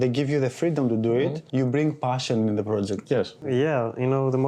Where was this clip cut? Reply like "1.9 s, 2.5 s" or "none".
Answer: 1.4 s, 3.4 s